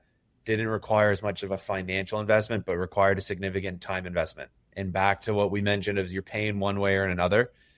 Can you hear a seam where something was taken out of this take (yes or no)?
no